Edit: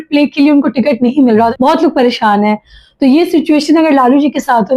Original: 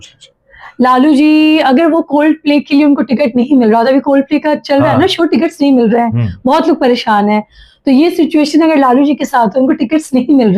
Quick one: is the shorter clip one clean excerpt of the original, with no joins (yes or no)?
no